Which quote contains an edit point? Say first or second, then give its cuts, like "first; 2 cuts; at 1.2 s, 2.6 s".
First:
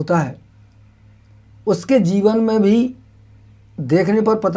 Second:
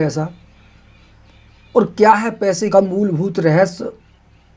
second; 1 cut; at 2.7 s